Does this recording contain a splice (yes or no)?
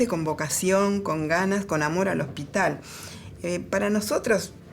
no